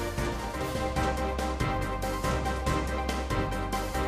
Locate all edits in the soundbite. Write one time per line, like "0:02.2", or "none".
none